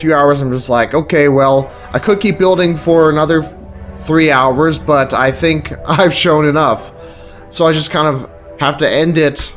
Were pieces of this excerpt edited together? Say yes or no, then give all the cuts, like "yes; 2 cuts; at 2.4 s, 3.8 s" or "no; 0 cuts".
no; 0 cuts